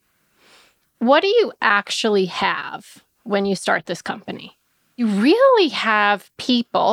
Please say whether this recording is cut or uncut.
cut